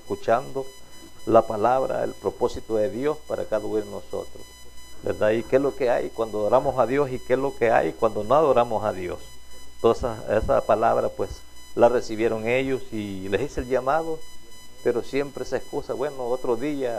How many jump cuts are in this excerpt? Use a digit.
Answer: 1